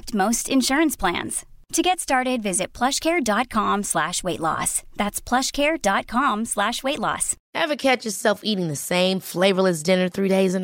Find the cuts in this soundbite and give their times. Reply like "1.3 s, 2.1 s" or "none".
7.4 s

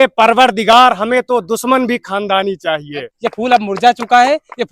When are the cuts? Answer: 3.0 s

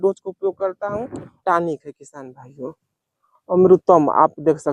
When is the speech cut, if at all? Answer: 1.4 s

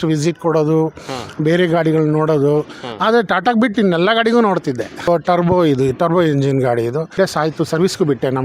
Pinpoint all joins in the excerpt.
5.1 s, 7.2 s

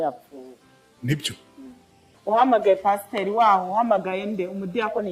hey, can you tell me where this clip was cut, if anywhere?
2.1 s

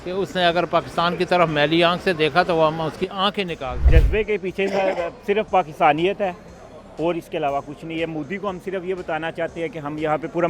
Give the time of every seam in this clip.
3.8 s

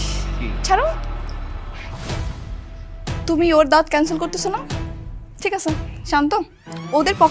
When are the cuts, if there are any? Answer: none

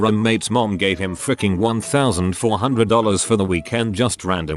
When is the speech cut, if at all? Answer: 2.0 s, 3.6 s

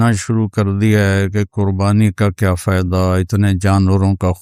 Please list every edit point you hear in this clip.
none

